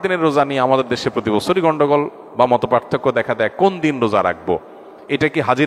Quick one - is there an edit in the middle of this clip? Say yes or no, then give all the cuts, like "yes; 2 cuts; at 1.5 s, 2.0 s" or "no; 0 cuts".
no; 0 cuts